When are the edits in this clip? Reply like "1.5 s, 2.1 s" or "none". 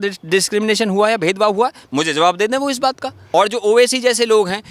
3.1 s